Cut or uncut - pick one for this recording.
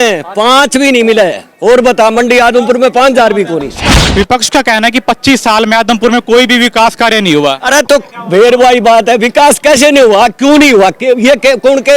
cut